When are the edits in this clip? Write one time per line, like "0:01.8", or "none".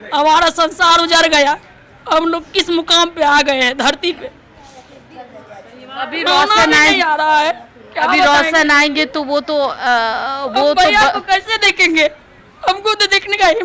none